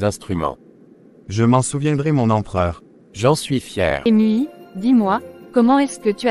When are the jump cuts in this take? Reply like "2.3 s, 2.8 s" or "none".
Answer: 4.0 s